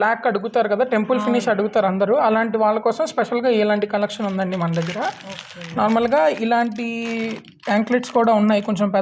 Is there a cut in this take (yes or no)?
no